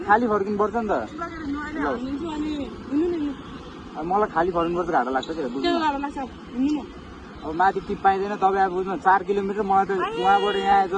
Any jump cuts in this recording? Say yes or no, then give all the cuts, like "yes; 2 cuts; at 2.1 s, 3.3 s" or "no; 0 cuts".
no; 0 cuts